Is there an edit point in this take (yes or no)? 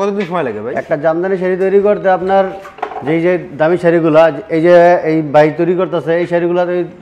no